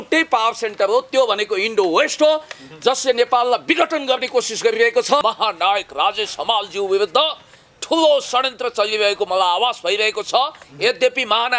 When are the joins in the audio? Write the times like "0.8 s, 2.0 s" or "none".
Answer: 5.2 s